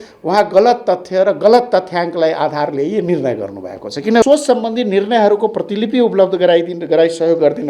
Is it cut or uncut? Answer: cut